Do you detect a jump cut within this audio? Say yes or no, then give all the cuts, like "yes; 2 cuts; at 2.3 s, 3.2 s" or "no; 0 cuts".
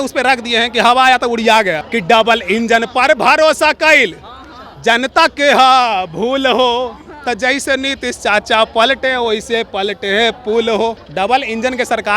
yes; 2 cuts; at 1.9 s, 11.0 s